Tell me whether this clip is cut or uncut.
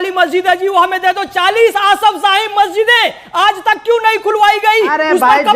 uncut